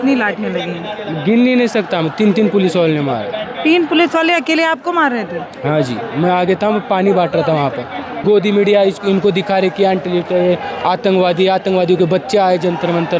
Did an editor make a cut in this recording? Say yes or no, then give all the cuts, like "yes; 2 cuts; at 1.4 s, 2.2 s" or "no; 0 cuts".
yes; 1 cut; at 8.1 s